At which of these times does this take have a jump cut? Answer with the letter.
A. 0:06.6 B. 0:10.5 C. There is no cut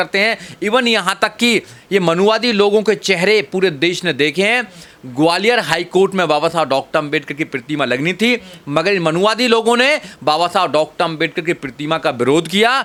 C